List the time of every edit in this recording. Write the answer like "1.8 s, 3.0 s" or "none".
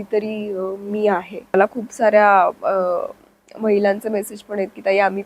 1.5 s